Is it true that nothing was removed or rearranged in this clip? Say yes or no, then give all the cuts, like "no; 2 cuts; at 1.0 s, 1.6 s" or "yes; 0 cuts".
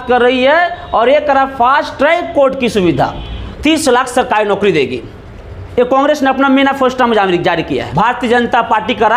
no; 2 cuts; at 3.5 s, 7.9 s